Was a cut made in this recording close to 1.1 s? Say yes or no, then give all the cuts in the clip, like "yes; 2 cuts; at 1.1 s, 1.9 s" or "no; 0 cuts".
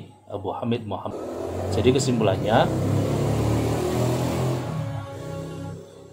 yes; 1 cut; at 1.1 s